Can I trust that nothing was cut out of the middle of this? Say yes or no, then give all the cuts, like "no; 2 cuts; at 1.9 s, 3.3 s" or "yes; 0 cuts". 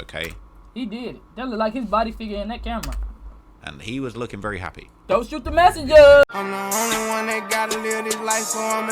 no; 1 cut; at 6.3 s